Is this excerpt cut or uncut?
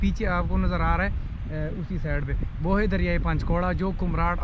uncut